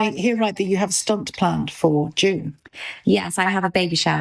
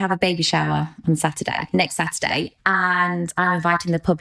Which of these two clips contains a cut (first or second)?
second